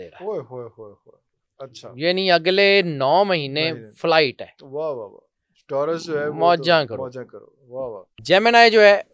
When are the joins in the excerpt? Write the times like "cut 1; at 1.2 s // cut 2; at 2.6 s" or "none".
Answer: cut 1; at 8.1 s